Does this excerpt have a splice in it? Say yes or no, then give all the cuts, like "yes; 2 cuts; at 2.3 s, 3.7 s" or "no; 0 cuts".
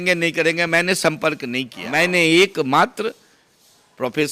yes; 1 cut; at 1.8 s